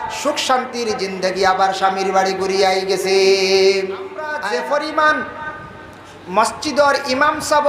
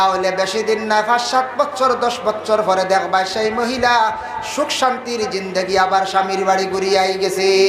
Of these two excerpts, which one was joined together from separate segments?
first; 1 cut; at 4.3 s

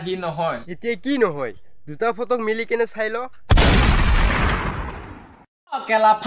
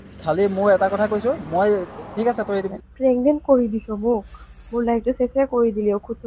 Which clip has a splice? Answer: second; 1 cut; at 2.7 s

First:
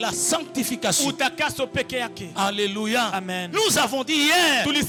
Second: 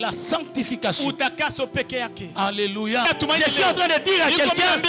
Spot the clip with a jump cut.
second; 1 cut; at 3.1 s

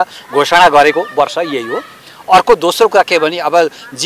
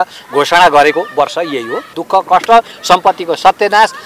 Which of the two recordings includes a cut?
second; 1 cut; at 1.9 s

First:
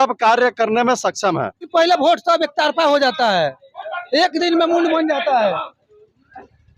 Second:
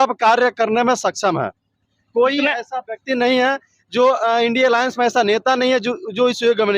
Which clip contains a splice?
first; 1 cut; at 1.7 s

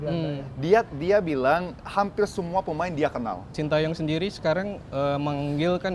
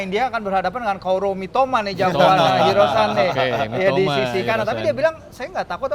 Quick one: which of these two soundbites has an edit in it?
first; 1 cut; at 3.6 s

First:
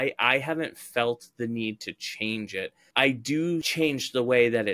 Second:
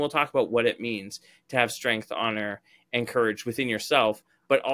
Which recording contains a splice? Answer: first; 2 cuts; at 2.8 s, 3.7 s

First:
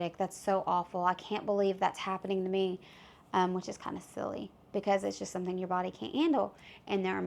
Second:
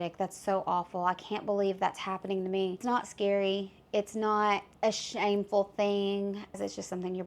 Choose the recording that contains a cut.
second; 3 cuts; at 2.8 s, 4.7 s, 6.6 s

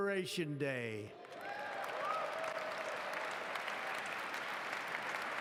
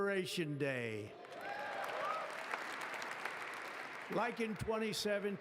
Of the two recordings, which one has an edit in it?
second; 1 cut; at 2.3 s

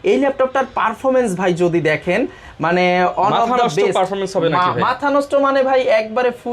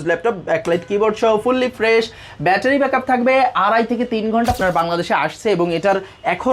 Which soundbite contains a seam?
second; 1 cut; at 4.6 s

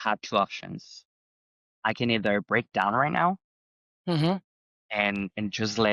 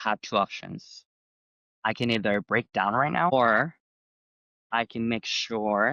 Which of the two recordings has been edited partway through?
second; 1 cut; at 3.3 s

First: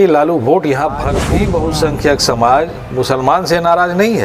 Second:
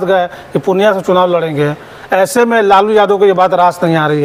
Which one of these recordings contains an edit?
first; 1 cut; at 1.2 s

